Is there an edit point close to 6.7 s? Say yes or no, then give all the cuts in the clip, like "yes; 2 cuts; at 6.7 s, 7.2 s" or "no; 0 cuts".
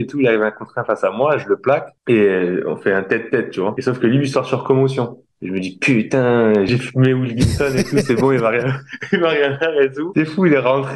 yes; 1 cut; at 6.7 s